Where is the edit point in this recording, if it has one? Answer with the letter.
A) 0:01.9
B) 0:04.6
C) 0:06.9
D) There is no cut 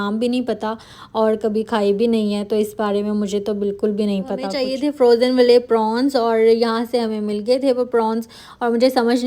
B